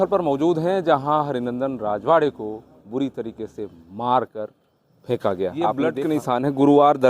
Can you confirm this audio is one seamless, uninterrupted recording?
no; 1 cut; at 5.8 s

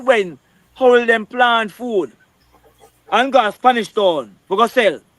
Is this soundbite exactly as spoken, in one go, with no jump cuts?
yes; 0 cuts

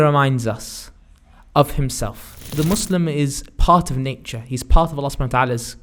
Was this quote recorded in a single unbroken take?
no; 1 cut; at 2.5 s

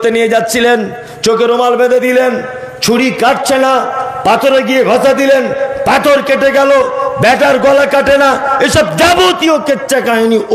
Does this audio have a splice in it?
no; 0 cuts

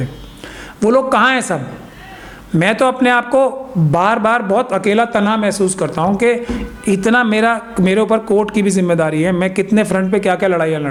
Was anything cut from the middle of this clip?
no; 0 cuts

